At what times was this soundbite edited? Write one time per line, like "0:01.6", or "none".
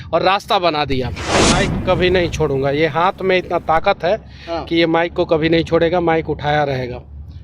0:01.4